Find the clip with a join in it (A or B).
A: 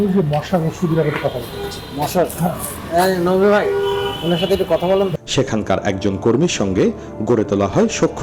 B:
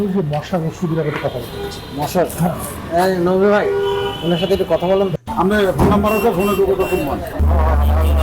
B